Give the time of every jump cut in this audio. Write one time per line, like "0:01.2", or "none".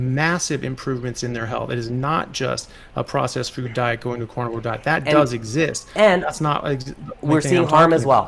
none